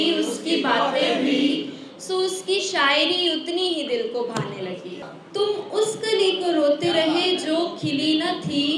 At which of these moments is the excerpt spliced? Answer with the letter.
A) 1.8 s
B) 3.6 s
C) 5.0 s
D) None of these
C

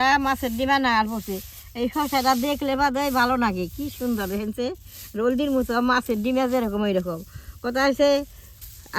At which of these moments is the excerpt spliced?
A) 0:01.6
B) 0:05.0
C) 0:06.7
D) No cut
D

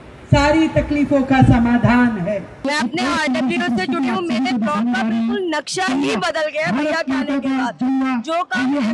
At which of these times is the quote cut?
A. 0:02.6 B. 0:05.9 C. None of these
A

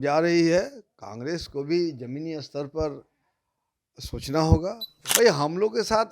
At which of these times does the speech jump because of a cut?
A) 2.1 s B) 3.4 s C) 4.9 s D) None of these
C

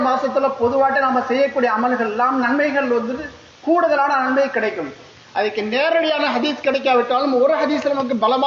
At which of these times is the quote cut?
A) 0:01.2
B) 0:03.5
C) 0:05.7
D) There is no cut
D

